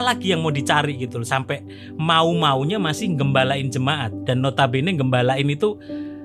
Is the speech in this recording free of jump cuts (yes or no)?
yes